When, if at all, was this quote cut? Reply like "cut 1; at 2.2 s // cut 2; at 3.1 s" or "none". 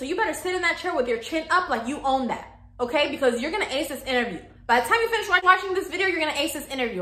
none